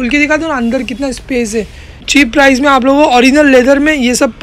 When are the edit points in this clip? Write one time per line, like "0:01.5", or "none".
0:02.1